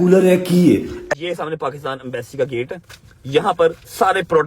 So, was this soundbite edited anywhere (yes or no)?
yes